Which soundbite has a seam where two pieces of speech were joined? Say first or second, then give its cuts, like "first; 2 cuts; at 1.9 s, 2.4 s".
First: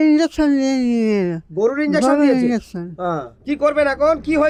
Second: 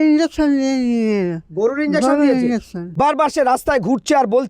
second; 1 cut; at 2.9 s